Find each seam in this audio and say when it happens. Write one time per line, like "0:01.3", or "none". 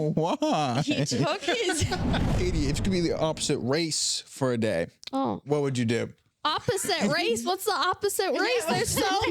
0:02.3